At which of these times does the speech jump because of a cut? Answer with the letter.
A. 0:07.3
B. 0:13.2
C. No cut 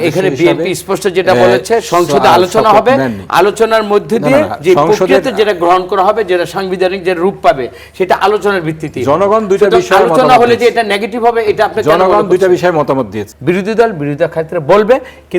B